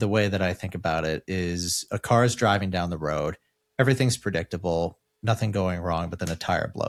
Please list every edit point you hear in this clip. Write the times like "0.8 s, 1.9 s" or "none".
none